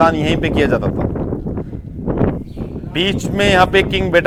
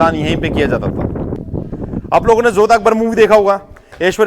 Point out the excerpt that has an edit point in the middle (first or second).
second